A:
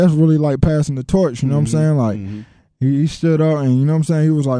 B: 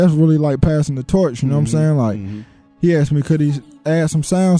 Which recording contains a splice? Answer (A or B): B